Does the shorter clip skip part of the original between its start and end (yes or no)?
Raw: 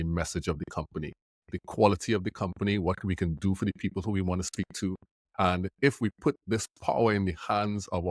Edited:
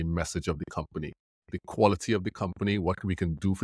no